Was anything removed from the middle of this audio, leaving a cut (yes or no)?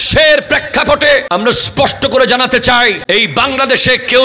yes